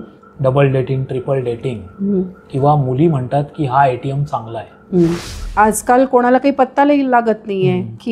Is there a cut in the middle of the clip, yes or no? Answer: yes